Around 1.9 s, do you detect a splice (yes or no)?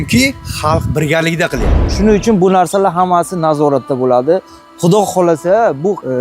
yes